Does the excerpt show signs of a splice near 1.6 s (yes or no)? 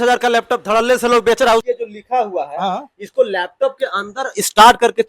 yes